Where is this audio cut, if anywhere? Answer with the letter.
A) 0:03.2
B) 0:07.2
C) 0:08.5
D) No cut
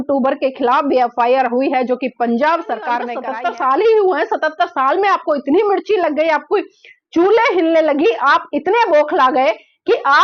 A